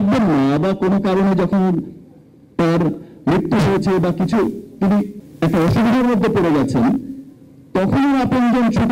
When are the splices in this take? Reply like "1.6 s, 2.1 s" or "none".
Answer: 5.2 s